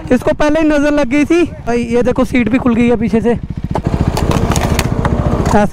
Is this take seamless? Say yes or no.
no